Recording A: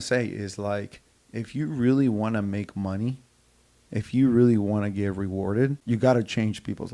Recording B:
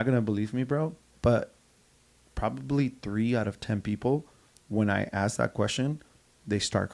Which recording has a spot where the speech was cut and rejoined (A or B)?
A